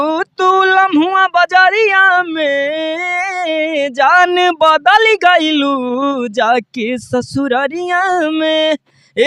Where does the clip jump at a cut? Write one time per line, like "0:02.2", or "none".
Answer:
none